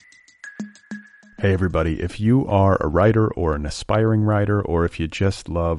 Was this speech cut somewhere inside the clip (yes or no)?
yes